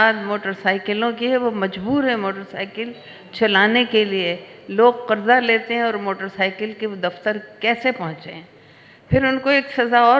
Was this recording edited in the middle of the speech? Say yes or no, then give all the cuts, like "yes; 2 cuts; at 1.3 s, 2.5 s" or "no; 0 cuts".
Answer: no; 0 cuts